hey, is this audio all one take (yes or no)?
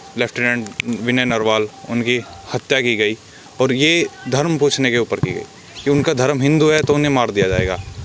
yes